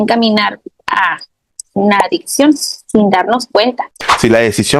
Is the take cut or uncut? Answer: cut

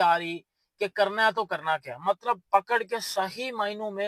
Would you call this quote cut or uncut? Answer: uncut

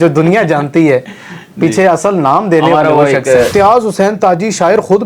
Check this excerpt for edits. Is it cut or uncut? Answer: cut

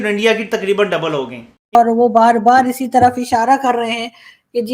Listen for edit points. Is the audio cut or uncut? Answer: cut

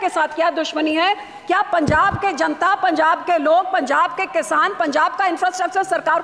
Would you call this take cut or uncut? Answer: uncut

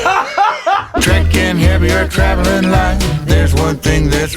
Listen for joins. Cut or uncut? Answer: cut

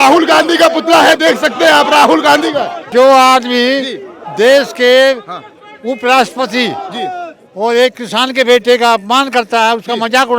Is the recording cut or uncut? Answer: cut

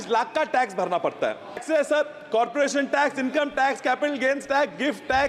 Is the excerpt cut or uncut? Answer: cut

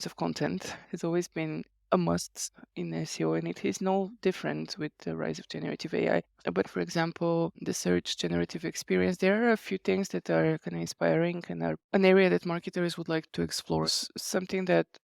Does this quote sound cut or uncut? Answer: cut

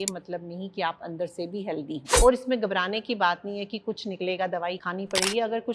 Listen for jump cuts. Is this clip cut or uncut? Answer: cut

